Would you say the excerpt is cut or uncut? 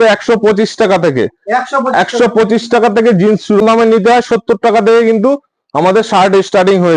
cut